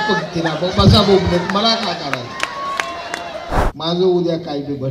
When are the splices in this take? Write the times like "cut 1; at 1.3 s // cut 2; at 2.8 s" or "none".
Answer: cut 1; at 3.7 s